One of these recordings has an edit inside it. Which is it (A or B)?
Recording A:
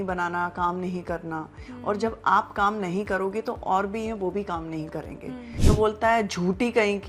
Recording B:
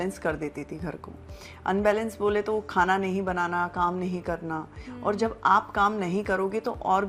A